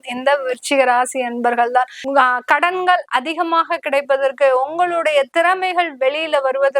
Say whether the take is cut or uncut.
cut